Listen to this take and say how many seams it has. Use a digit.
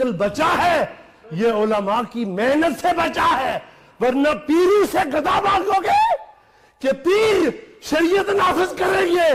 0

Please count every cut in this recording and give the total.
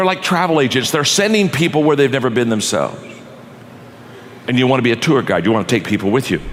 0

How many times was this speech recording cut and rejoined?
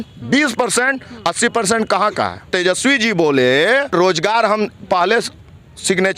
2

